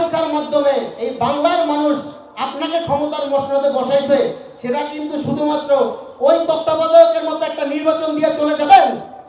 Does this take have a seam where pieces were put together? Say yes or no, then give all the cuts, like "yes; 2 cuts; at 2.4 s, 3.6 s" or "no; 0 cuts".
no; 0 cuts